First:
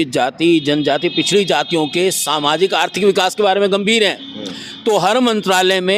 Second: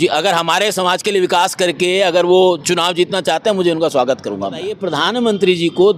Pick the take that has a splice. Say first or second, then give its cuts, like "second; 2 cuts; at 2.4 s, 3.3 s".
second; 1 cut; at 4.8 s